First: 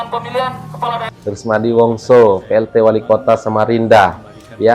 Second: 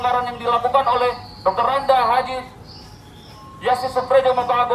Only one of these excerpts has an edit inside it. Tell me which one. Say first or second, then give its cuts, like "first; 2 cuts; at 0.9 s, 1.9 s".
first; 1 cut; at 1.1 s